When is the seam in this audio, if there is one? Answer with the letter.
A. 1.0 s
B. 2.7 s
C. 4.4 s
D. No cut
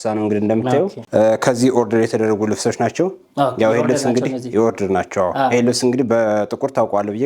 A